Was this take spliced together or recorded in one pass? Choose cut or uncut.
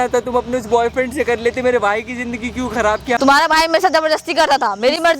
cut